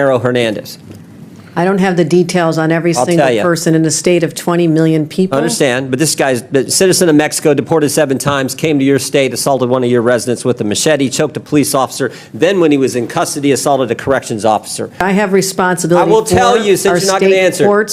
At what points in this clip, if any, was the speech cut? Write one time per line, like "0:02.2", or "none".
0:15.0